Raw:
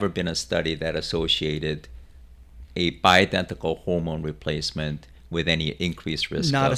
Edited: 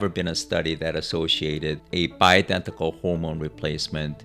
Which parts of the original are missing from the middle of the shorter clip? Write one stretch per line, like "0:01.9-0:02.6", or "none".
0:01.8-0:02.7